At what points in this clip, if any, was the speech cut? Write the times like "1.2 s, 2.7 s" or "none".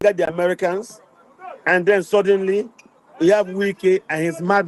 none